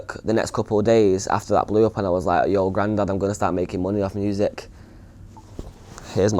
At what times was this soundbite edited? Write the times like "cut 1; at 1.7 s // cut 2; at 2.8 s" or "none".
none